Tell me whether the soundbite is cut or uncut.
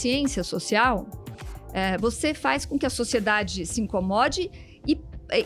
uncut